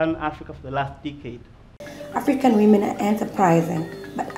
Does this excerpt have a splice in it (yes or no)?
yes